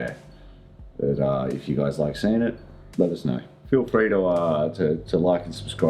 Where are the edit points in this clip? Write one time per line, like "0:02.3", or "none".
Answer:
0:03.6